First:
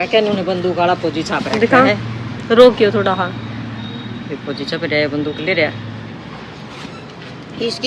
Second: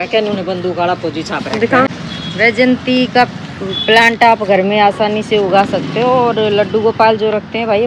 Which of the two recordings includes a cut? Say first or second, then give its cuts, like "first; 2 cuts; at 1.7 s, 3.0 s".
second; 1 cut; at 1.9 s